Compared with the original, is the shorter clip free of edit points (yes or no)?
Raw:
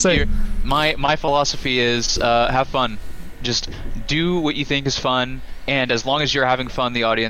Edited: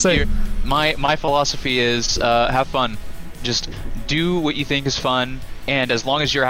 yes